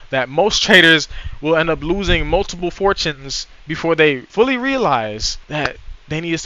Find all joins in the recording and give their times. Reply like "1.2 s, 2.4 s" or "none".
none

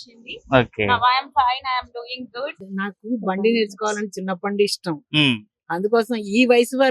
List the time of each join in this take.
2.6 s

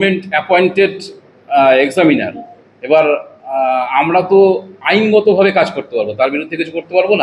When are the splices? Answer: none

